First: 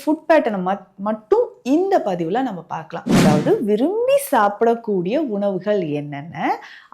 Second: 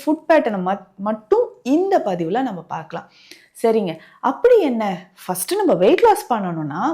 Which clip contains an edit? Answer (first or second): first